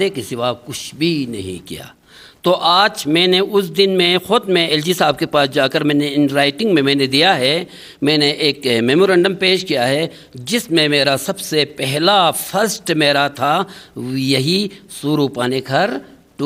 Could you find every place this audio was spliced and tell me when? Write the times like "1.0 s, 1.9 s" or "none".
none